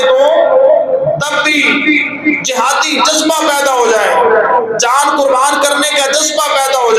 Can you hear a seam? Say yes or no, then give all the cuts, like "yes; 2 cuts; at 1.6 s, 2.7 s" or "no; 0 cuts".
no; 0 cuts